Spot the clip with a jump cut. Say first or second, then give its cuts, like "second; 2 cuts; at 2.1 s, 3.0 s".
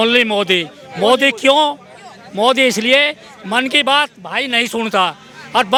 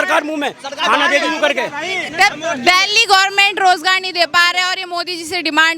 second; 1 cut; at 2.0 s